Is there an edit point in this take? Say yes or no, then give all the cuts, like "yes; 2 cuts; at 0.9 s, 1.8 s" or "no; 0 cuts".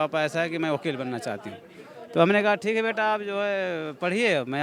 no; 0 cuts